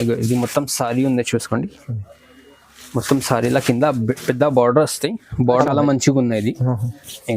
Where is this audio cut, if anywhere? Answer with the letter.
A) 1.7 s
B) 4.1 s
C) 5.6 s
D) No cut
C